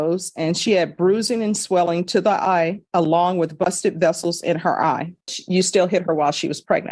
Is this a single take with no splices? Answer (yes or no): no